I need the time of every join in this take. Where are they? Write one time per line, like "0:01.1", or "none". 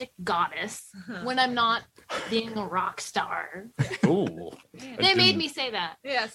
none